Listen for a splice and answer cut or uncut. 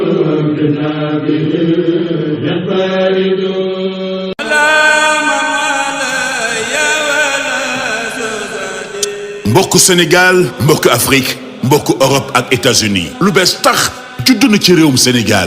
cut